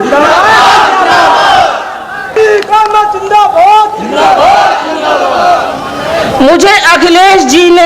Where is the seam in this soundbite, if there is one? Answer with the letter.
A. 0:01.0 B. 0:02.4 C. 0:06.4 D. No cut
B